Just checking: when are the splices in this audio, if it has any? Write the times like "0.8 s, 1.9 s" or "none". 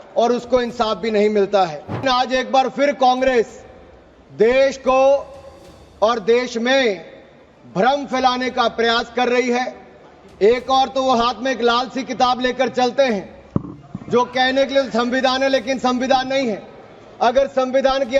2.0 s